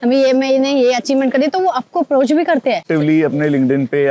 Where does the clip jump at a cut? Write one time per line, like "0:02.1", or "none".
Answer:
0:02.8